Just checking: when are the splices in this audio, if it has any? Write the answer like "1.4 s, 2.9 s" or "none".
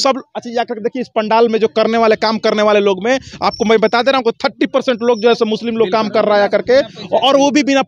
none